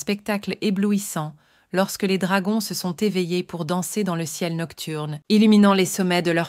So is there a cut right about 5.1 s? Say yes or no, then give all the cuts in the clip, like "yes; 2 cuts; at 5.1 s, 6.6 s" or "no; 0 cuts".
yes; 1 cut; at 5.1 s